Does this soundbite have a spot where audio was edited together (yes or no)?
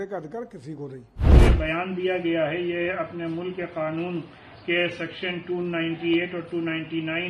yes